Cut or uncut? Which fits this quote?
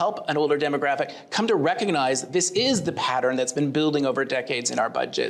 uncut